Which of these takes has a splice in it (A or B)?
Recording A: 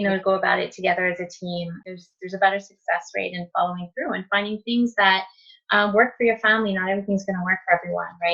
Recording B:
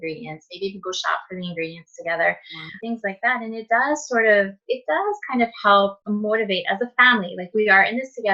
B